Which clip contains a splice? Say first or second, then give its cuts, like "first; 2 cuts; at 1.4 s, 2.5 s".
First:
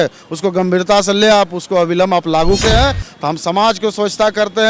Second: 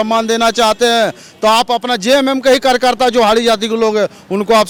first; 1 cut; at 2.6 s